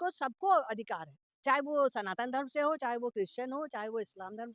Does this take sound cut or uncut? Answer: uncut